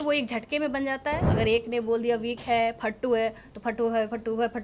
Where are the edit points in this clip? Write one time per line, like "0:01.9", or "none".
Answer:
0:01.3